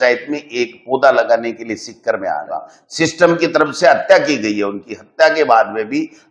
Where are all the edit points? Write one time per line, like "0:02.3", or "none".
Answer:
0:02.8